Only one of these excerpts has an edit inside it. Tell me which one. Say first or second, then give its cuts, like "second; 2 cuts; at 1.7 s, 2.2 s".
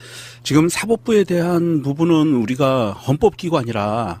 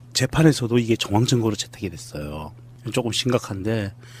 first; 1 cut; at 2.6 s